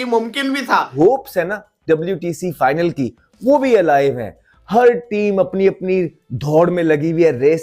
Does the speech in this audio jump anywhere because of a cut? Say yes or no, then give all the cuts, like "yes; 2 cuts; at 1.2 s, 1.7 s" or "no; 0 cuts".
yes; 1 cut; at 1.0 s